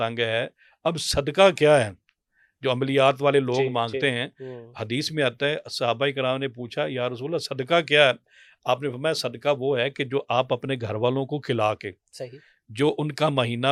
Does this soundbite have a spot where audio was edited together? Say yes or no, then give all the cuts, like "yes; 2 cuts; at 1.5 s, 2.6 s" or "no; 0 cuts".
no; 0 cuts